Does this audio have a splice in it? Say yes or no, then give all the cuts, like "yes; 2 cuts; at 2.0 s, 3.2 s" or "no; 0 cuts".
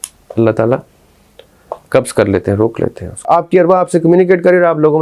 yes; 1 cut; at 3.4 s